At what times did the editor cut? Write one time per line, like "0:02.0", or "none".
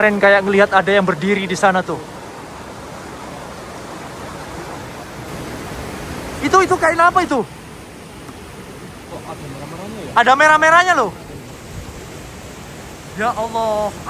0:06.4